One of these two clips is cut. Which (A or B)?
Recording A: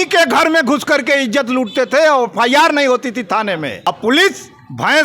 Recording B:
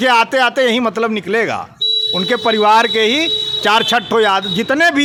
A